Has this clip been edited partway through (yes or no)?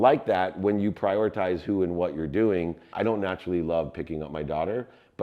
yes